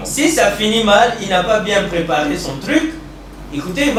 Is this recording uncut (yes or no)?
yes